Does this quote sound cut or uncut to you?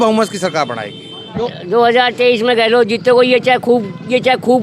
cut